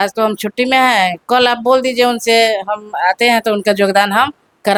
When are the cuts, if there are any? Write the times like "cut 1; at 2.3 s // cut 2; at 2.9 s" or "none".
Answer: none